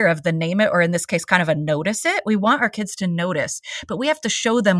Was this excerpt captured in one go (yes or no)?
yes